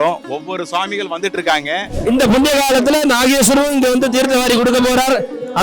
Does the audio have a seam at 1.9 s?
yes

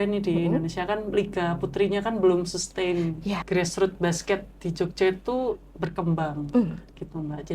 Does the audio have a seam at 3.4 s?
yes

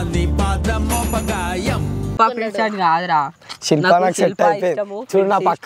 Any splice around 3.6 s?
no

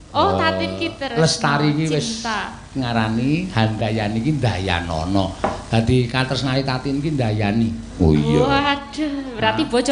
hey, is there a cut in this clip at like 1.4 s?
no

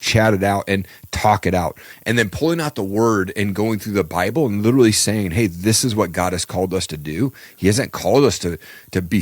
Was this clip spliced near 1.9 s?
yes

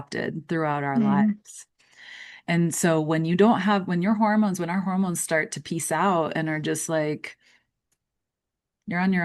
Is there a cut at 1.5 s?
no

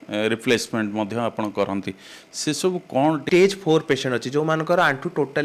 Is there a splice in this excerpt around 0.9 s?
no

